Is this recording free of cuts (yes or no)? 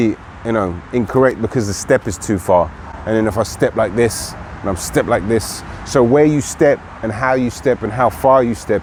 yes